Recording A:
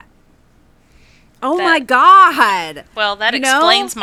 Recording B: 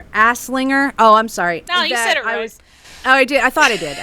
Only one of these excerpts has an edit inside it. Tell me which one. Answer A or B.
B